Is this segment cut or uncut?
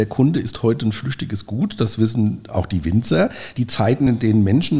uncut